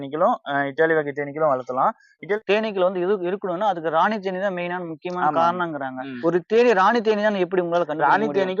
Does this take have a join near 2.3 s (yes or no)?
yes